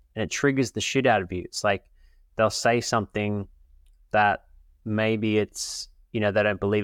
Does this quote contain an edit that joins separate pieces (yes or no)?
no